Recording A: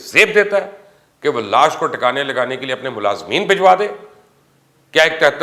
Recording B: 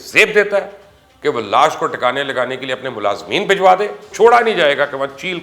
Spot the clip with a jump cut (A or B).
B